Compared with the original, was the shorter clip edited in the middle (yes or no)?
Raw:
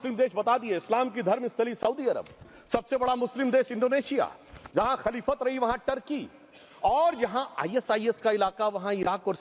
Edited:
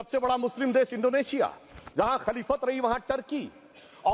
no